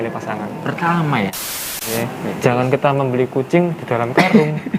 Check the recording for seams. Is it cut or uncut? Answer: cut